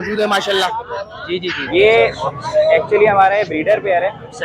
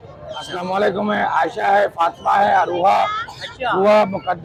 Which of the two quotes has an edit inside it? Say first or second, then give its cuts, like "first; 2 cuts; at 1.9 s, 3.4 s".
first; 1 cut; at 1.6 s